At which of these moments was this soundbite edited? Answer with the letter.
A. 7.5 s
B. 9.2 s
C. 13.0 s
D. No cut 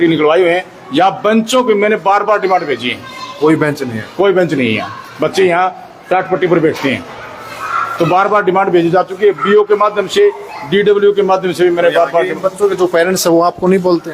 D